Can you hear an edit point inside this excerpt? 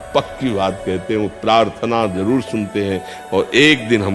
no; 0 cuts

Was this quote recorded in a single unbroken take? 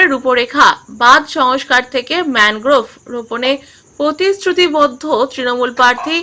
yes; 0 cuts

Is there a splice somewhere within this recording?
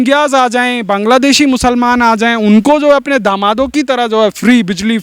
no; 0 cuts

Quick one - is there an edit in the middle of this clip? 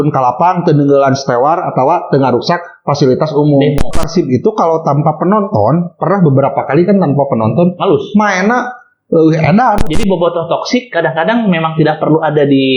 yes; 2 cuts; at 3.9 s, 9.8 s

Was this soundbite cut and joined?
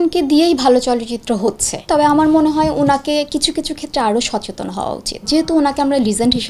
yes; 2 cuts; at 1.8 s, 5.2 s

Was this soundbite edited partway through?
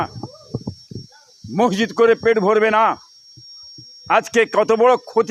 no; 0 cuts

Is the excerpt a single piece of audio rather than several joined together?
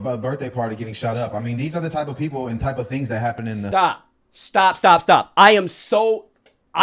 yes; 0 cuts

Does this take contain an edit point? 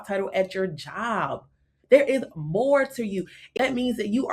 yes; 1 cut; at 3.4 s

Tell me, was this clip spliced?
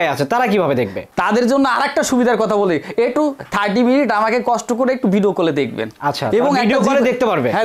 no; 0 cuts

